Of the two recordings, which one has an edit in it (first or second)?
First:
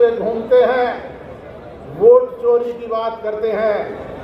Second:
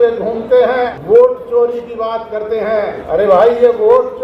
second